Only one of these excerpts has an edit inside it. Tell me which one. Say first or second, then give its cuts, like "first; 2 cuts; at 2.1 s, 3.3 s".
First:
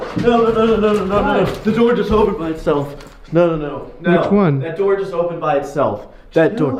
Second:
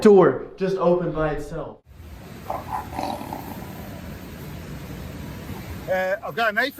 second; 2 cuts; at 1.5 s, 5.4 s